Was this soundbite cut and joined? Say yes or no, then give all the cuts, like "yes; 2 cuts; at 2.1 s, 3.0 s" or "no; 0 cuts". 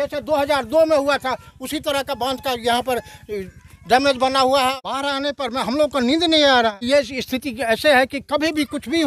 yes; 2 cuts; at 4.8 s, 6.8 s